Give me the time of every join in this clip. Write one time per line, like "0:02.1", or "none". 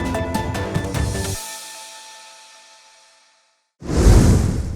0:03.8